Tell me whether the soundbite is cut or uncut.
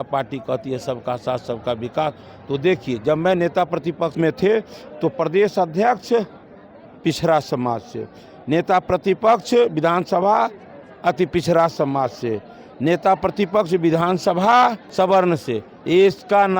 cut